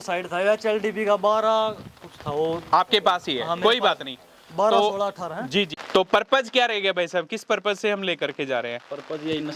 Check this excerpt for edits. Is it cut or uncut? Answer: cut